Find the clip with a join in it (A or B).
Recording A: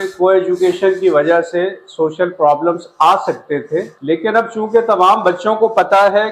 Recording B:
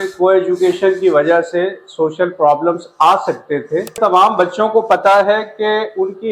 B